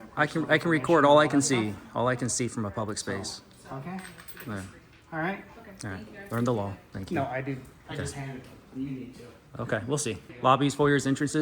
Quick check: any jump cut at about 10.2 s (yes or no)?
yes